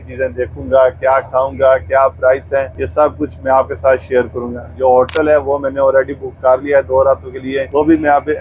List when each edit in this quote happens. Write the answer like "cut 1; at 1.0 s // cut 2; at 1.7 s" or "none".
none